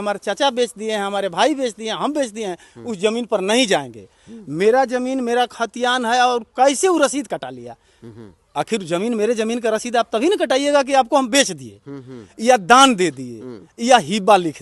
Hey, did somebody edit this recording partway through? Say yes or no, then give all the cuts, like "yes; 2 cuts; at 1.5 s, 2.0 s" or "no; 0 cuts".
no; 0 cuts